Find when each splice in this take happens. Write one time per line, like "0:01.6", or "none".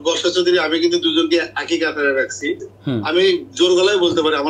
0:02.7